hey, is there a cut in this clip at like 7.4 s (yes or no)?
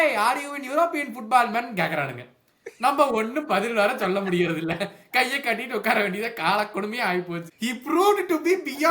yes